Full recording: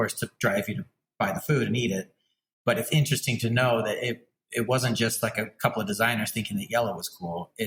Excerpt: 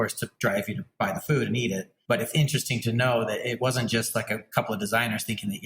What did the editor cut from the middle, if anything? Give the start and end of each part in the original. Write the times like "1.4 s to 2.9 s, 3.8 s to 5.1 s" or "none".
0.9 s to 1.1 s, 2.1 s to 2.5 s, 4.2 s to 4.7 s